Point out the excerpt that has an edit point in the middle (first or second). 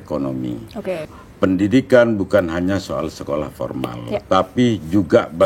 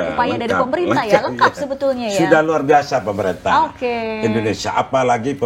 first